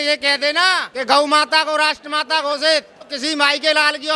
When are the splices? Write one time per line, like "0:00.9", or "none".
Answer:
0:00.9
0:03.1